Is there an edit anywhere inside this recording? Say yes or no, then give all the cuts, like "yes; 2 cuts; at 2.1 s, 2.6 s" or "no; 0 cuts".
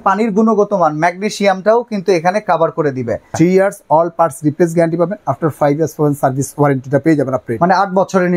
yes; 1 cut; at 3.4 s